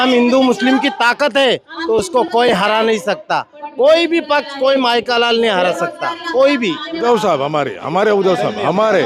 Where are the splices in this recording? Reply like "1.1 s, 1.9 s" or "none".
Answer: 7.0 s